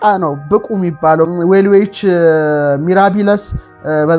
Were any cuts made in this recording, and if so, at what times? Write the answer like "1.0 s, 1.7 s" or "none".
1.3 s